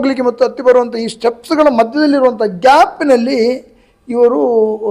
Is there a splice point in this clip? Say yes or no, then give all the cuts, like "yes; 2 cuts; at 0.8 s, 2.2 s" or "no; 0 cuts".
no; 0 cuts